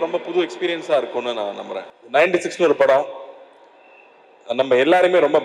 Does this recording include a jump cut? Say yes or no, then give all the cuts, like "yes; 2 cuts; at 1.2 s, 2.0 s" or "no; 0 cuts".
yes; 1 cut; at 1.9 s